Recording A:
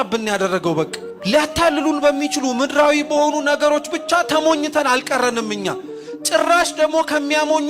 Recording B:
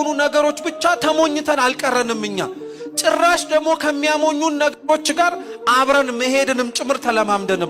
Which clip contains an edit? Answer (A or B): A